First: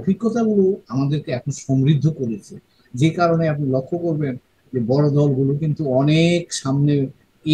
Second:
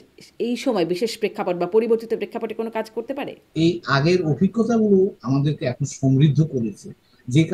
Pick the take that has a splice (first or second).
second